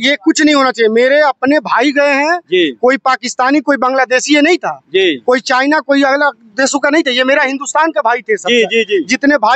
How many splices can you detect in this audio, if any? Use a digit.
0